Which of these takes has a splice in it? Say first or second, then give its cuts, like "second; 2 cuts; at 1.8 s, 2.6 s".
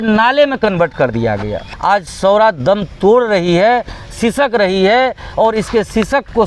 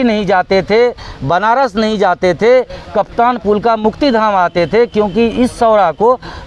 first; 1 cut; at 1.7 s